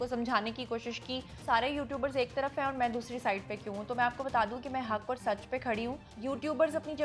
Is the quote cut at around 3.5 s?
no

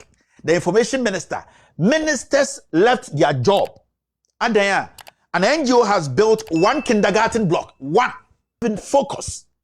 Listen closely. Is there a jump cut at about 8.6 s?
yes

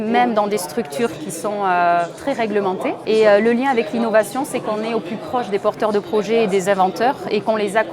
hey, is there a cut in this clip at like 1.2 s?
yes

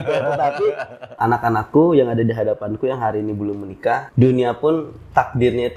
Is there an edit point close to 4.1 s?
yes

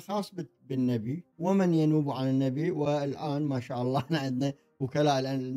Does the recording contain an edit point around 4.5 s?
no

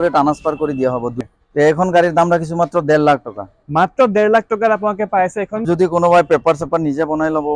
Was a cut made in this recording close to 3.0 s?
no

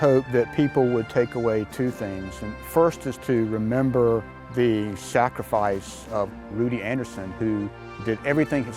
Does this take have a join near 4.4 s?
yes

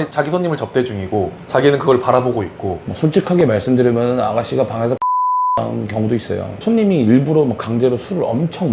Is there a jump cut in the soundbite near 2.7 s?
yes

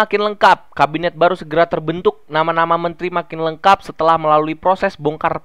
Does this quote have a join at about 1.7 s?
no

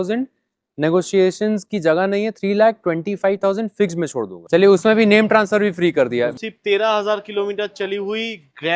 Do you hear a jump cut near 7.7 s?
no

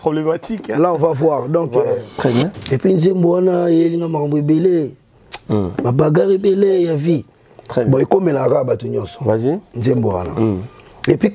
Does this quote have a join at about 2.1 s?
yes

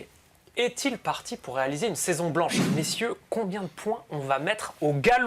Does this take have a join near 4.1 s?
no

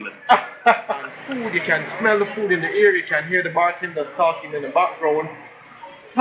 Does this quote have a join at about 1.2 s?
yes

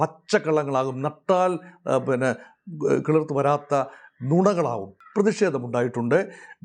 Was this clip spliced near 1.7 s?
no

